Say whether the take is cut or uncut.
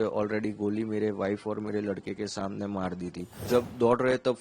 cut